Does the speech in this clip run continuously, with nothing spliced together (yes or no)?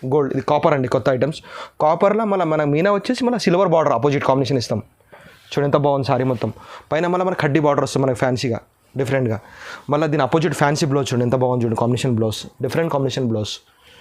yes